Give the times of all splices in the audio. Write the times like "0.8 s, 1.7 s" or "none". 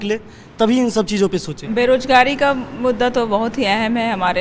1.6 s